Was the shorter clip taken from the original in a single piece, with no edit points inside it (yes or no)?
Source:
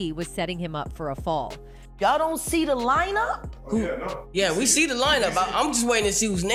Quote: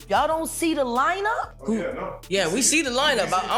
no